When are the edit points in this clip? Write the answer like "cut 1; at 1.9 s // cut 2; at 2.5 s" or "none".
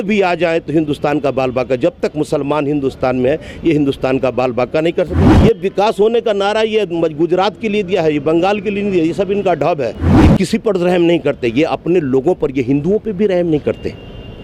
cut 1; at 5.3 s // cut 2; at 10.0 s